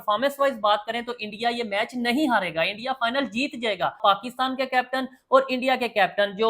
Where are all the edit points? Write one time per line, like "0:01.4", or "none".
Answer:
0:04.0